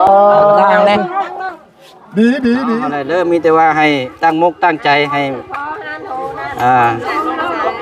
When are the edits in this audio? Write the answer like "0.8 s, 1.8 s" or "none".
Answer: 2.8 s